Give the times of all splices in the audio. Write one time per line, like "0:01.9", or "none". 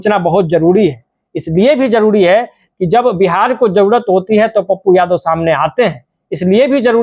none

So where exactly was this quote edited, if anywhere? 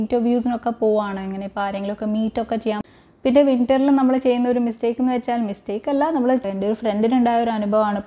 0:02.8
0:06.4

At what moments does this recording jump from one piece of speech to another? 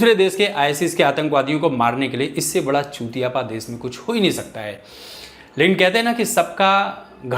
none

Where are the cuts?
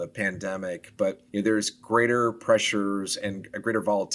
0:01.2

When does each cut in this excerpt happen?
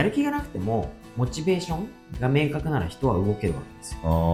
none

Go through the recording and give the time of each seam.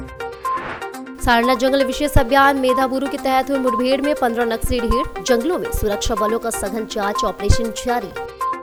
none

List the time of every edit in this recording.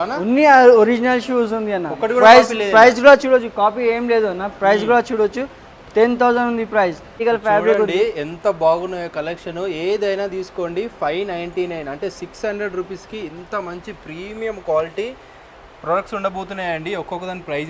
0:07.2

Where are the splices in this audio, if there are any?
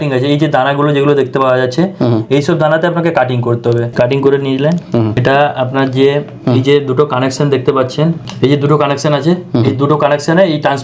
0:03.9
0:05.2
0:08.2

